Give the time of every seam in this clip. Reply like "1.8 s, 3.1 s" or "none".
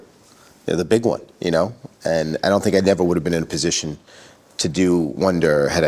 none